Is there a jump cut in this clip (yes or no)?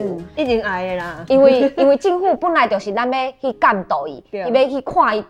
no